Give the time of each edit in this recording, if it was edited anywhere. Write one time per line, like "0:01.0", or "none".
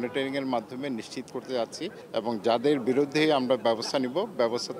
0:01.9